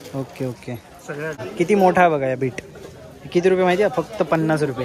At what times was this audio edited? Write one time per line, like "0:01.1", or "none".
0:01.5